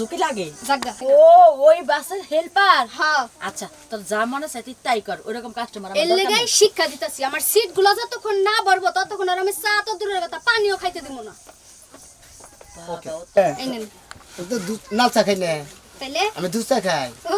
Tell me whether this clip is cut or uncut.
cut